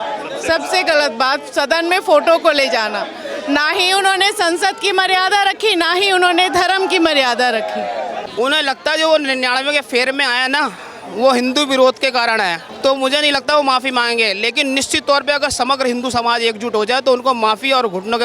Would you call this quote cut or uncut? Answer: cut